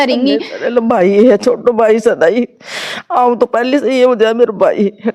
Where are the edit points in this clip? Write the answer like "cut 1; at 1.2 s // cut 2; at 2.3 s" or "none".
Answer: none